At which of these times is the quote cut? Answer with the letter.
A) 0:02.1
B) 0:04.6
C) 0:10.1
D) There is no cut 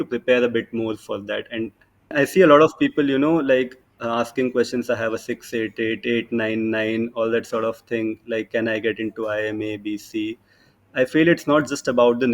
A